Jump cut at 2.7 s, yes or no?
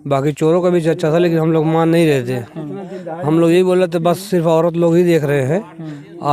no